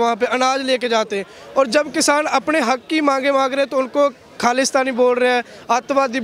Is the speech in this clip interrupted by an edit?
no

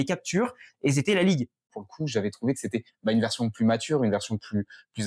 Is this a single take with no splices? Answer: no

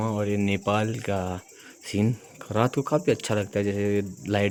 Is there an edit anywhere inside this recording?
no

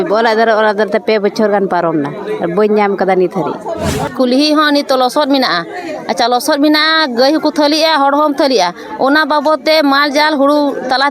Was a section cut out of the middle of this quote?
yes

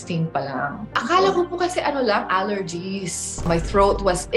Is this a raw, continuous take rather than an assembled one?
no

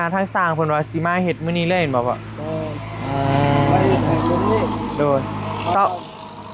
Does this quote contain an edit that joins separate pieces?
no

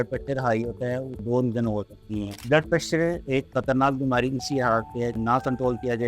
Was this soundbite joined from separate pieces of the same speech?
yes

